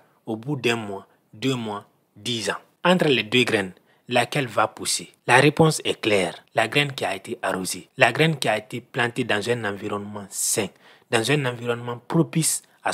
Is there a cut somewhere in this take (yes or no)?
no